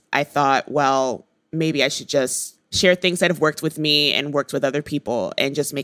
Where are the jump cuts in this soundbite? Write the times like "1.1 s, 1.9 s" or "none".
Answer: 2.7 s